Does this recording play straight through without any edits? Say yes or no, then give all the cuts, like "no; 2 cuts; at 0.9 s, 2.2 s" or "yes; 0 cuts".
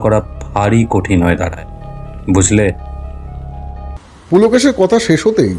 no; 1 cut; at 4.0 s